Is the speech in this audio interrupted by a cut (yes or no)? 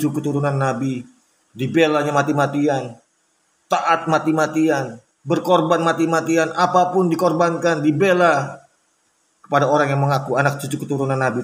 no